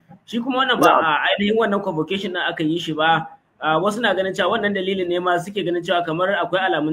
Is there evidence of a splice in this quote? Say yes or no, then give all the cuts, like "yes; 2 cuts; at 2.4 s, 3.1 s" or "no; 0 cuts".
no; 0 cuts